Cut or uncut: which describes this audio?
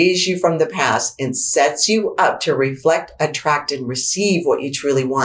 uncut